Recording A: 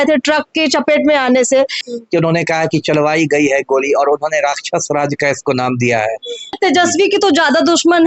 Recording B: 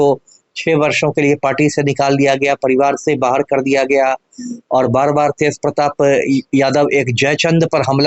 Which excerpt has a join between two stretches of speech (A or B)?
A